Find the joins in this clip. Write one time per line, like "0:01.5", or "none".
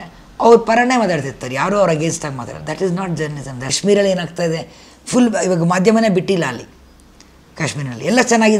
0:03.6